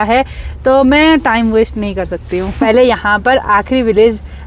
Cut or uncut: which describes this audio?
cut